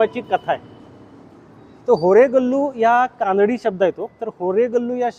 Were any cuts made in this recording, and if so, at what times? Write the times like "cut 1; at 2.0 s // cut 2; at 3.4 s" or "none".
none